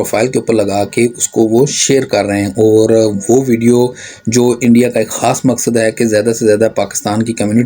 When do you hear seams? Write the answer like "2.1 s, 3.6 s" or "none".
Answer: none